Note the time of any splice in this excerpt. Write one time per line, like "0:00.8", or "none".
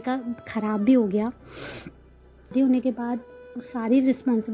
0:02.4